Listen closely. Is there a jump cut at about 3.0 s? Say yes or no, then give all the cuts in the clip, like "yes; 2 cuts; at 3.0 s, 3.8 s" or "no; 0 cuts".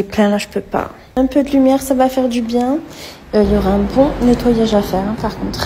no; 1 cut; at 1.0 s